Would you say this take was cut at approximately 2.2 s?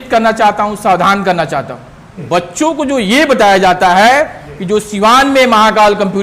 yes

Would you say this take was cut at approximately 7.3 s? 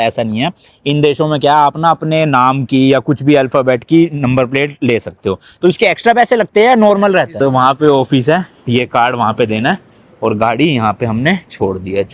yes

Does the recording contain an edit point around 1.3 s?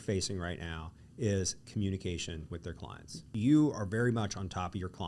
no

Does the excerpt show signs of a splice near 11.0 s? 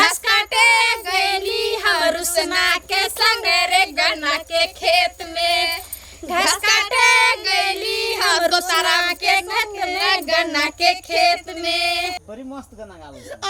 no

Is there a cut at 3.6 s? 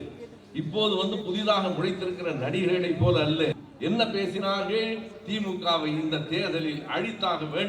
yes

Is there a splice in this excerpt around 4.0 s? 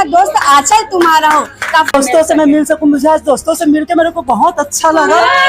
no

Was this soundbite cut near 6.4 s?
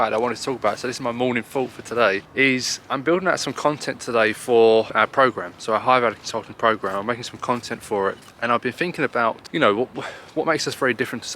no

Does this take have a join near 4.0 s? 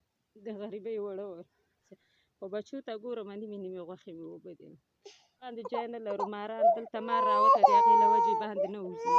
no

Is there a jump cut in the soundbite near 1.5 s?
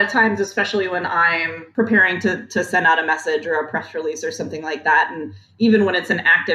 yes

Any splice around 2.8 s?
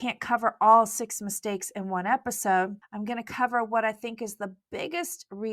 yes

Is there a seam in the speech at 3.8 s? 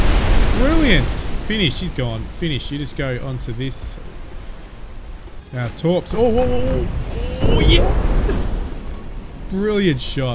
no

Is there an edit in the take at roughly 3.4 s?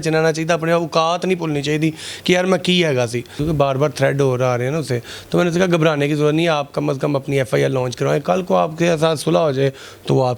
yes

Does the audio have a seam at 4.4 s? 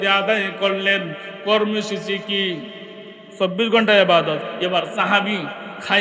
yes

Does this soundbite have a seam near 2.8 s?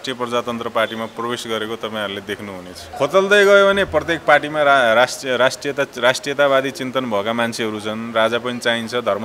yes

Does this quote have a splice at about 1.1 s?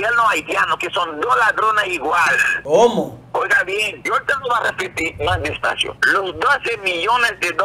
no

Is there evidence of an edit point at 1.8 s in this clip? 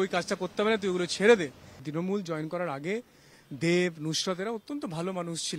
yes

